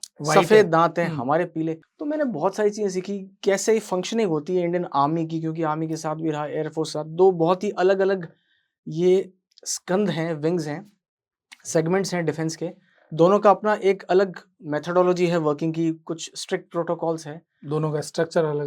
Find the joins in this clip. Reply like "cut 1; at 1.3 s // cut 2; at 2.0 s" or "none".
cut 1; at 1.9 s